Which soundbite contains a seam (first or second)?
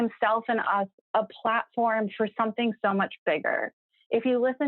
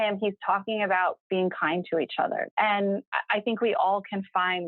second